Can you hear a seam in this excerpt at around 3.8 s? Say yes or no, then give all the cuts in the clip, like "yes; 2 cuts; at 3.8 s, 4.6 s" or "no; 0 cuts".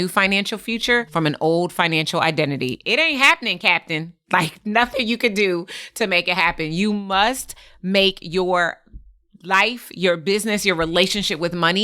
no; 1 cut; at 1.1 s